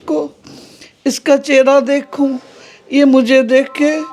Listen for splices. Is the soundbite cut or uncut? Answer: uncut